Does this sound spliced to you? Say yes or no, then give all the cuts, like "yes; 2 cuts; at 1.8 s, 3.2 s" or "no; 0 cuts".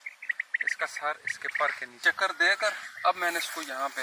yes; 1 cut; at 2.1 s